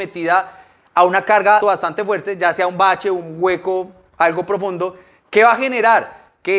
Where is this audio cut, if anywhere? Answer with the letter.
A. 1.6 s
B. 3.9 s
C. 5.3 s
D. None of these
A